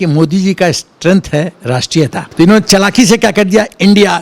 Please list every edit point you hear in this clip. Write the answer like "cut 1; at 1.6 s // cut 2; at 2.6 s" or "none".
cut 1; at 2.2 s